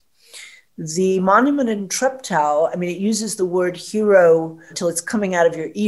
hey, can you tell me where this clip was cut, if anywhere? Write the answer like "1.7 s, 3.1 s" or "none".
1.9 s, 4.7 s

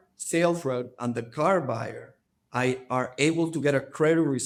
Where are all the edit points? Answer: none

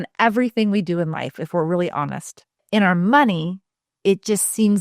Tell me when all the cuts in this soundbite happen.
2.6 s

